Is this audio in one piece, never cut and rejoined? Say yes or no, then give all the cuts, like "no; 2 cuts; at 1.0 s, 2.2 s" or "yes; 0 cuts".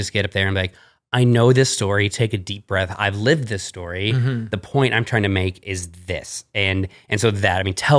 yes; 0 cuts